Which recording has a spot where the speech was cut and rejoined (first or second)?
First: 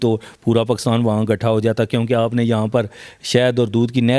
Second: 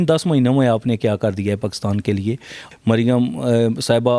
second